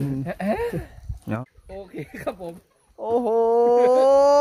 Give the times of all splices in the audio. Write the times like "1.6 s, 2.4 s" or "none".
1.4 s